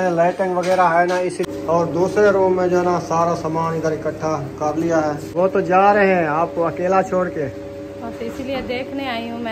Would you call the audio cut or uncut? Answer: cut